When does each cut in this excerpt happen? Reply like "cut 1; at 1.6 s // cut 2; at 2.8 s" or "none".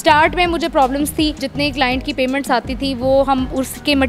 cut 1; at 1.5 s